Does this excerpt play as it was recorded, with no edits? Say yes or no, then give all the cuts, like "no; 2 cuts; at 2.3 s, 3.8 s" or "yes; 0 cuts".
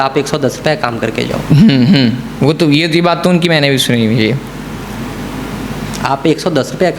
yes; 0 cuts